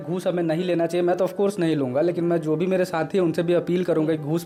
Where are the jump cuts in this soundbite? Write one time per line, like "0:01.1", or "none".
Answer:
none